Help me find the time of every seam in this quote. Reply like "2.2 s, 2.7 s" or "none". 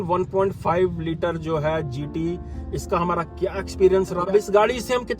4.3 s